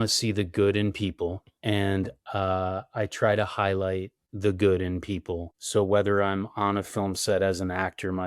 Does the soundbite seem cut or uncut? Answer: cut